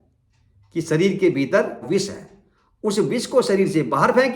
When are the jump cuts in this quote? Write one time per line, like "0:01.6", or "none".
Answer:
0:01.8